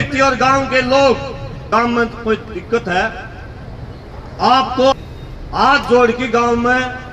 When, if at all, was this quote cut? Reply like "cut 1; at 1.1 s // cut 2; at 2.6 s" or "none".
cut 1; at 1.5 s // cut 2; at 4.9 s